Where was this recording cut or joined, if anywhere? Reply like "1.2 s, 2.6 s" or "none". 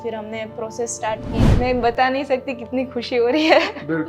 1.4 s